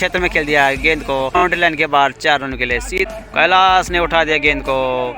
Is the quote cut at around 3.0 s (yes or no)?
yes